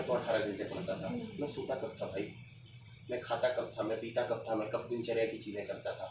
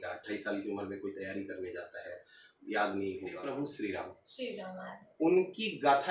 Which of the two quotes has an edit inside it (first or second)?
second